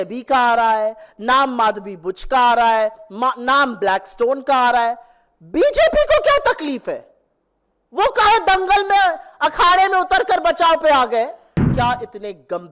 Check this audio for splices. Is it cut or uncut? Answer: cut